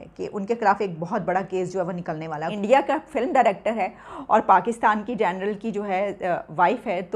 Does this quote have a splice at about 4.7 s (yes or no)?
no